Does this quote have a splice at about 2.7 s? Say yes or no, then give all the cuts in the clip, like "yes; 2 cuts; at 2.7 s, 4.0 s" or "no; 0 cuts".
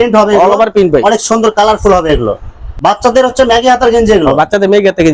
yes; 1 cut; at 2.7 s